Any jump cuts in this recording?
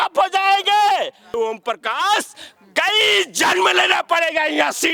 yes; 1 cut; at 1.4 s

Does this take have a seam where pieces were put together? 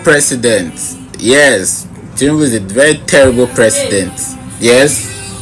no; 0 cuts

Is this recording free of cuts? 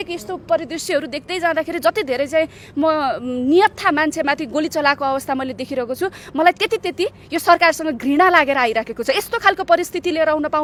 yes; 0 cuts

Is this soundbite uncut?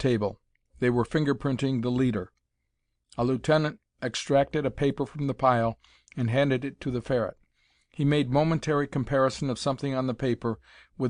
yes; 0 cuts

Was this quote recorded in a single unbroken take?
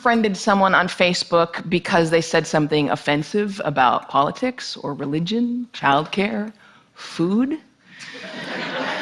no; 1 cut; at 2.5 s

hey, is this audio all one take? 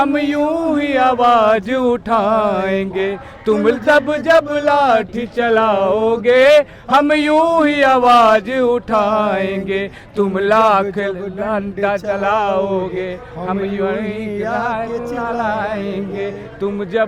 yes; 0 cuts

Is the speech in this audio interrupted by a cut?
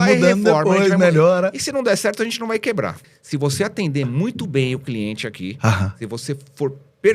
yes; 1 cut; at 3.0 s

